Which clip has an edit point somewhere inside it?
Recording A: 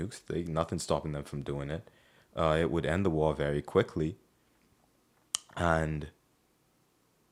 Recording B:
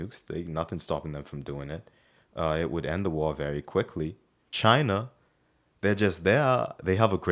B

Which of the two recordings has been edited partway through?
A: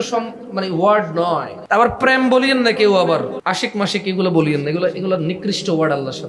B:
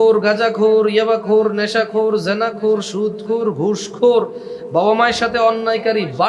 A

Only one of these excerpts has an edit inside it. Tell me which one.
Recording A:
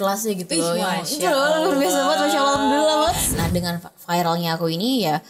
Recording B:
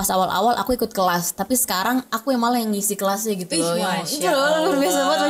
A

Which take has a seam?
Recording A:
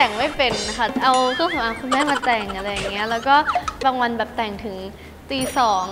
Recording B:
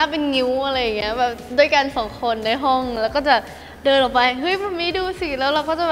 A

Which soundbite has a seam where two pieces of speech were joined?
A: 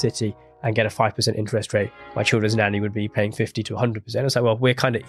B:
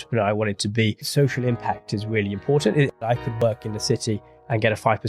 B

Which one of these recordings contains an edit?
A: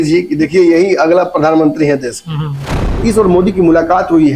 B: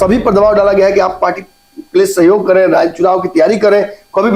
A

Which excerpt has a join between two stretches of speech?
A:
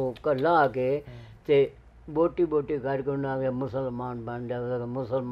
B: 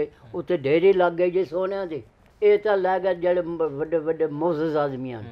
B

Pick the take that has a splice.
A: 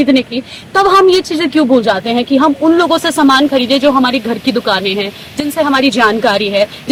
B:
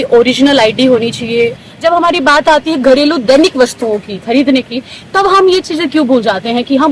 B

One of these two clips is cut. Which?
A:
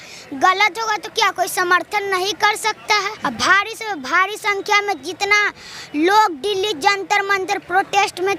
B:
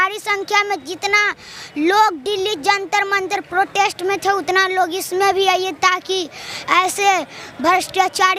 A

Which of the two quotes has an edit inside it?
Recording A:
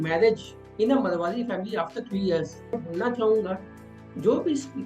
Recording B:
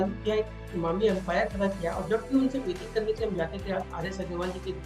A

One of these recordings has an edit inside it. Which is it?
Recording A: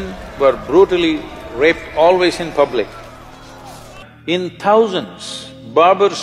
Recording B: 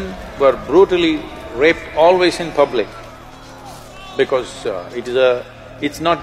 A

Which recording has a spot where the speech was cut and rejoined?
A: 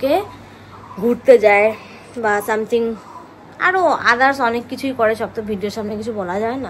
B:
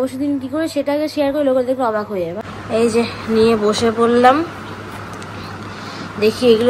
B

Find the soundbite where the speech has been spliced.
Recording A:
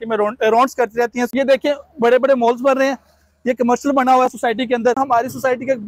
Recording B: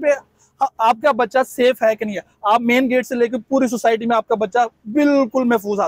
A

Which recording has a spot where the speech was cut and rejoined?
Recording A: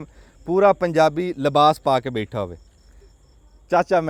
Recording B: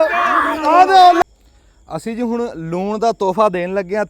B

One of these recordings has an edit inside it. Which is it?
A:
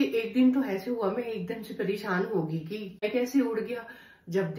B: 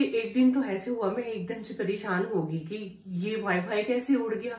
A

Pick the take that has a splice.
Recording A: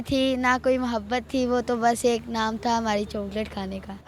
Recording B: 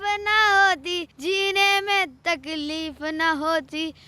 B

